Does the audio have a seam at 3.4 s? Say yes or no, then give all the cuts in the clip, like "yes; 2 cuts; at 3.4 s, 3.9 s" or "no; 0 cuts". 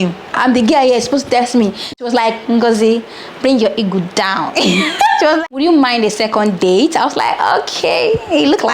no; 2 cuts; at 2.0 s, 5.5 s